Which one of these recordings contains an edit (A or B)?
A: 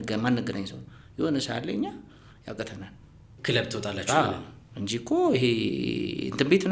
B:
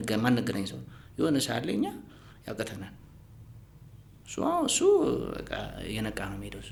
A